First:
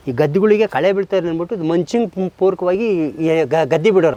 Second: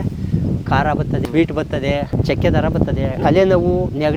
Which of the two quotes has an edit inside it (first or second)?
second